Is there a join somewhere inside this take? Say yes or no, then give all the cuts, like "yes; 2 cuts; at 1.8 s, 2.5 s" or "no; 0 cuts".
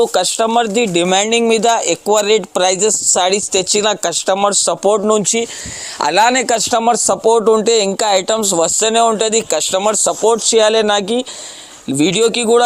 no; 0 cuts